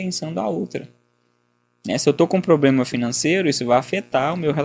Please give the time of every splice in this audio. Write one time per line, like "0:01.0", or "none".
none